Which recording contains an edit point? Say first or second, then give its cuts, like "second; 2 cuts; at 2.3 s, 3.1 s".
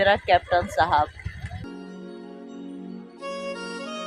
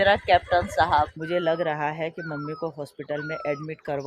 second; 1 cut; at 1.2 s